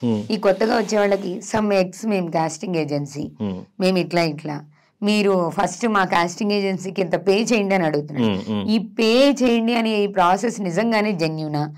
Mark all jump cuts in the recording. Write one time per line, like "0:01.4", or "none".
none